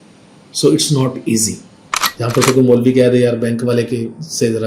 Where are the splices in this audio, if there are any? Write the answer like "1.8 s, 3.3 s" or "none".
2.1 s